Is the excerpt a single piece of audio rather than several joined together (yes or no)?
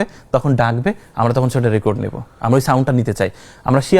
yes